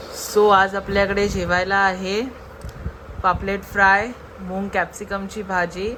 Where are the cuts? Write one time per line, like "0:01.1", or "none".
none